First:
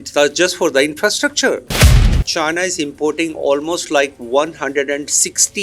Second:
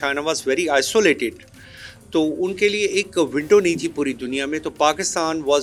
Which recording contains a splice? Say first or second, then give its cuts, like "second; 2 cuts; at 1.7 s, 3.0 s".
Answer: first; 1 cut; at 2.1 s